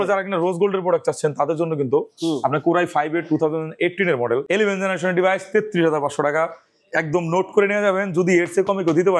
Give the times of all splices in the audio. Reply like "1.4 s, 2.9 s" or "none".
4.5 s